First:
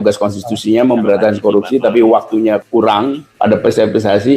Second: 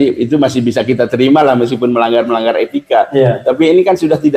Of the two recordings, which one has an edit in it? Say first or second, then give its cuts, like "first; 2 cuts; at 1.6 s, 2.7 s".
first; 1 cut; at 2.8 s